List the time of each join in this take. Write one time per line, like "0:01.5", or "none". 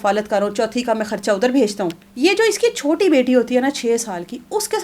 0:02.0